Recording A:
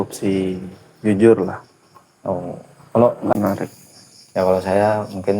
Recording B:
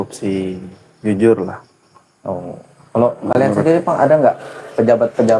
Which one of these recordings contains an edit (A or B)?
A